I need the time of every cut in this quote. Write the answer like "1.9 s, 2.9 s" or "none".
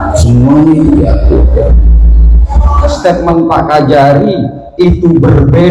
2.9 s

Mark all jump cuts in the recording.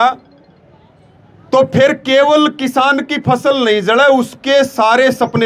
none

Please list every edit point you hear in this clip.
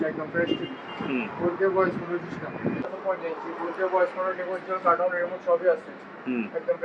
2.8 s

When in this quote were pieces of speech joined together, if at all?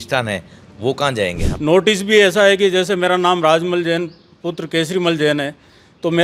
1.4 s

